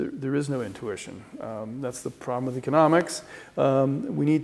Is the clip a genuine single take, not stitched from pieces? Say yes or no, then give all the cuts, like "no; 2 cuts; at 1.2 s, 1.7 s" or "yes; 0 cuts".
yes; 0 cuts